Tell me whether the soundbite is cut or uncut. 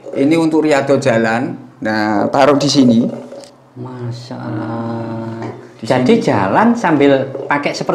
uncut